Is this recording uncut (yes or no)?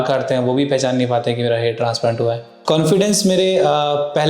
no